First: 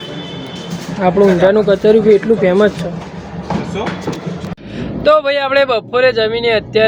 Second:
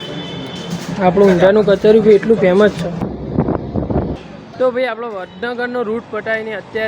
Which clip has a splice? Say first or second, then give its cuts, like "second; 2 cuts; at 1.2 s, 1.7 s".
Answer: second; 1 cut; at 3.0 s